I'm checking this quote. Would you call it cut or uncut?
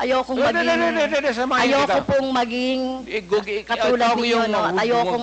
uncut